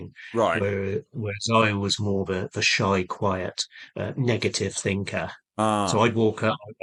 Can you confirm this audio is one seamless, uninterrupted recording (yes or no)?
yes